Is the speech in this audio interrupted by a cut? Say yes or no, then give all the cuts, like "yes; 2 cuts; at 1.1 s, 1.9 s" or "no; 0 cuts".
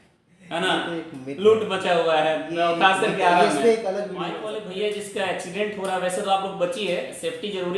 yes; 1 cut; at 4.4 s